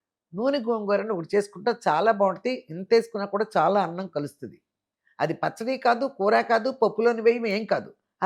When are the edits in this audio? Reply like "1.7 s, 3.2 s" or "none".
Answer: none

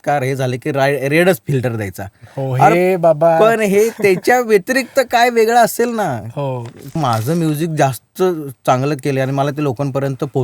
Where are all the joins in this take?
6.9 s

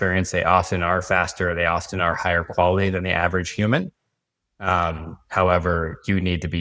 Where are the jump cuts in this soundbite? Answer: none

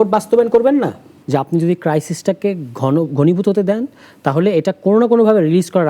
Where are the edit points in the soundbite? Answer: 1.1 s

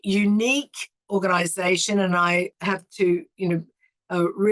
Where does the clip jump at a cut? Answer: 1.0 s, 2.5 s

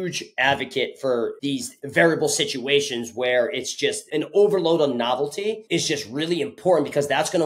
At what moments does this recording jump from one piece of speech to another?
1.4 s, 5.6 s

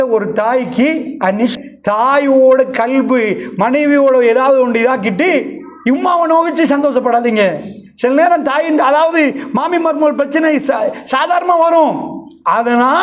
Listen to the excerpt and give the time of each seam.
1.6 s

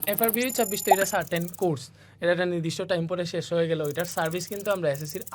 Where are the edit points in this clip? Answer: none

